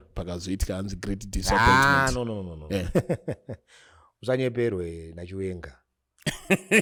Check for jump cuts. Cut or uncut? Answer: uncut